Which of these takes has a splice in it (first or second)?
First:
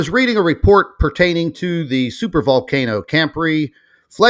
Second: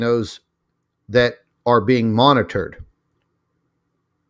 second